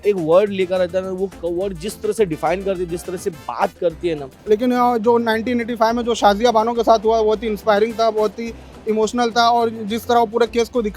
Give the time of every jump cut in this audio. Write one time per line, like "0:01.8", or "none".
0:04.3

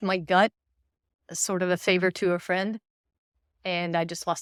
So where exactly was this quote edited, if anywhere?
none

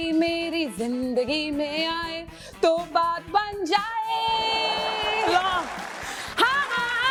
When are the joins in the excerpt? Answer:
none

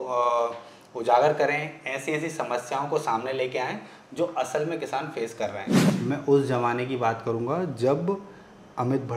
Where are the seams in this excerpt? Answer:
0:05.8

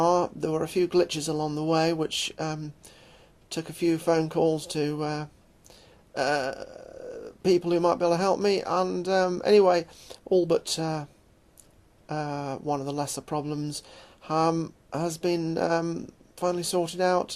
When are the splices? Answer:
0:01.3

